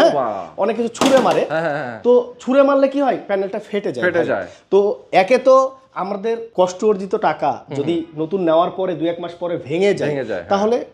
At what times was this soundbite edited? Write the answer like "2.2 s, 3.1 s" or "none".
none